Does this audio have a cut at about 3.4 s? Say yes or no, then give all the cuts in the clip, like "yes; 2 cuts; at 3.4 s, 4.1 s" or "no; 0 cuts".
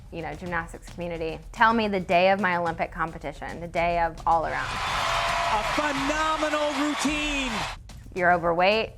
no; 3 cuts; at 1.5 s, 4.7 s, 7.7 s